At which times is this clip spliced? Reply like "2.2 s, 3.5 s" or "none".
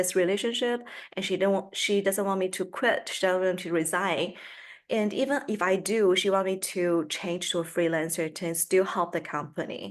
none